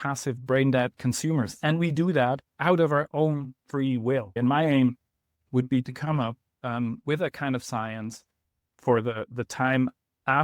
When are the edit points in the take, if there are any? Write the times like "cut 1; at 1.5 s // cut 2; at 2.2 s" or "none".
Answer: cut 1; at 0.9 s // cut 2; at 4.4 s